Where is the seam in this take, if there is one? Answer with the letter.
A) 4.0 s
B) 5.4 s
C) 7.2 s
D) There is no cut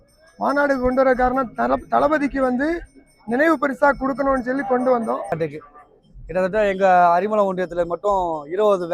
B